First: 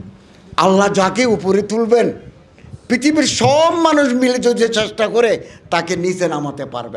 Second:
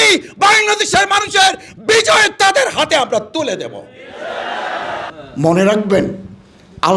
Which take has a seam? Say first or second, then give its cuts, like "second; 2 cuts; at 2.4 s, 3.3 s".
second; 1 cut; at 5.1 s